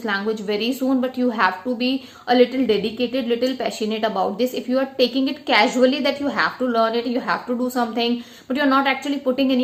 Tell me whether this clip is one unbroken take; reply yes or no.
yes